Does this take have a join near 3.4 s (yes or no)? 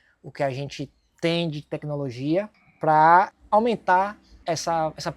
yes